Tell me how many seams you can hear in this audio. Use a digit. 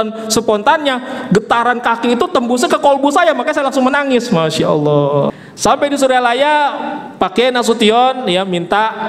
1